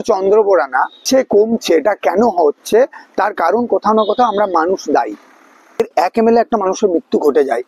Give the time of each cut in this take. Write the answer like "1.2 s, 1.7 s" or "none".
1.0 s, 5.8 s